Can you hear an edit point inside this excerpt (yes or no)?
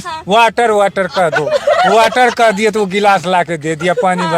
no